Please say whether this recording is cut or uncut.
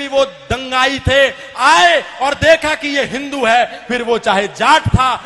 uncut